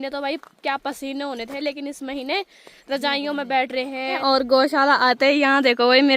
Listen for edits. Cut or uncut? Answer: cut